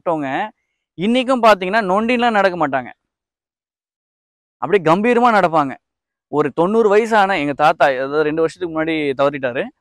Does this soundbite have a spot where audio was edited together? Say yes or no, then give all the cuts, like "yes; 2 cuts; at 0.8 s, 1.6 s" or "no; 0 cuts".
no; 0 cuts